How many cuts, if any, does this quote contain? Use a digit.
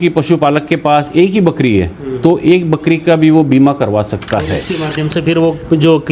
1